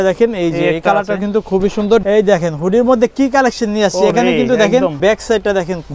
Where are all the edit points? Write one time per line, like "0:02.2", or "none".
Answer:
0:02.0
0:05.0